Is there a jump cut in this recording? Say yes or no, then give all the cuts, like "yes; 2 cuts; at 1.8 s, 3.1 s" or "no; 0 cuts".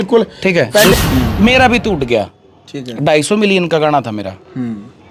yes; 1 cut; at 0.9 s